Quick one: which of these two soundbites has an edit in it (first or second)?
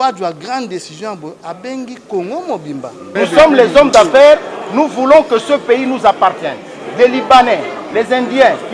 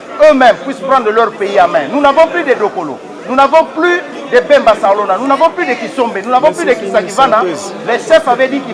first